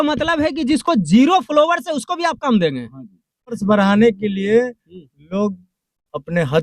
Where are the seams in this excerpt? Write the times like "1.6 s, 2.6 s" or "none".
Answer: 3.6 s